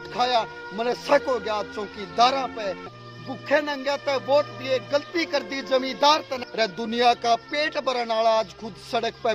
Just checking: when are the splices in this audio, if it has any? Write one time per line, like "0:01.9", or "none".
0:02.9
0:06.4

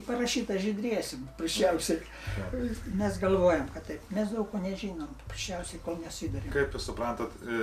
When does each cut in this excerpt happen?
none

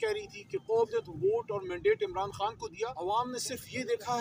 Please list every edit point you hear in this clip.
0:03.0

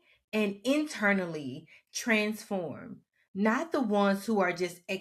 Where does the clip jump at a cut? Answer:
none

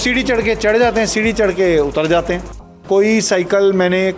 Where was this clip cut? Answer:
0:02.7

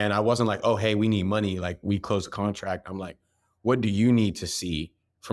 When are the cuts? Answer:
none

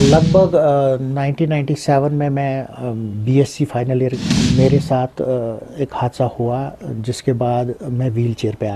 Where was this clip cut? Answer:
0:04.3

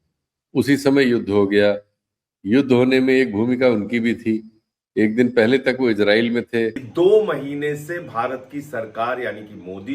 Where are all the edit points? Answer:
0:06.8

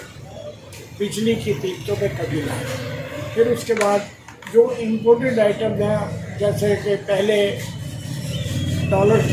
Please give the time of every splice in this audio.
none

